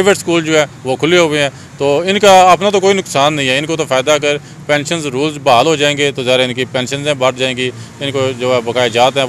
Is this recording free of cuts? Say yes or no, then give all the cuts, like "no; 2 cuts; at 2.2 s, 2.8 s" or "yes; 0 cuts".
yes; 0 cuts